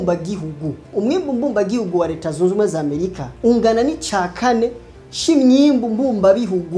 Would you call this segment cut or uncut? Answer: uncut